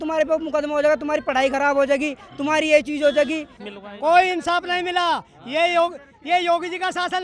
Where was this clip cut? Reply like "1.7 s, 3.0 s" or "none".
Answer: 3.6 s